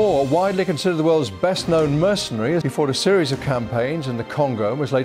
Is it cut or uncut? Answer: cut